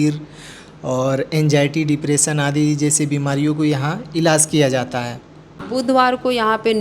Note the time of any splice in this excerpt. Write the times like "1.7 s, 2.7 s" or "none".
5.6 s